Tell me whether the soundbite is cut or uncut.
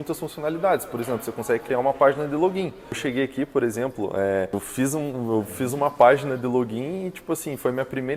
cut